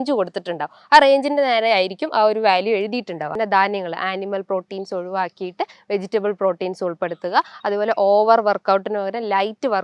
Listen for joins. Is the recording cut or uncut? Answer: cut